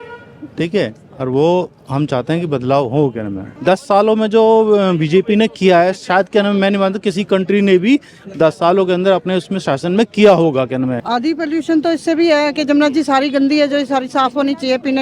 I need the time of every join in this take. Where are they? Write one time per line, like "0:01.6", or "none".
0:03.4
0:11.0